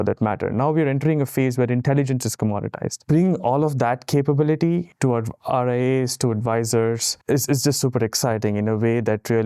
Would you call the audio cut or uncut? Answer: cut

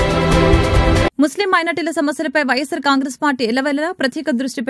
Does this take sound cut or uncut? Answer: uncut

